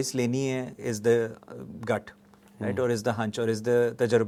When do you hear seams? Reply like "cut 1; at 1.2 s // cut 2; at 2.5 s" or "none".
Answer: none